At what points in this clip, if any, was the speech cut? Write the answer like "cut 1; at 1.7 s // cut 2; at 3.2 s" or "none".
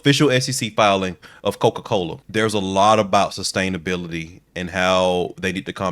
cut 1; at 2.2 s